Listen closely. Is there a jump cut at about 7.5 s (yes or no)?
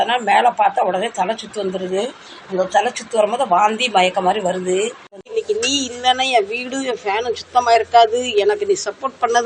no